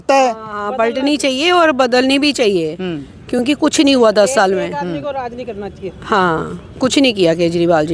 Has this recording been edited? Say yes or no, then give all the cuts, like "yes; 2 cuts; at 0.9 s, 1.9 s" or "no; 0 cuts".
no; 0 cuts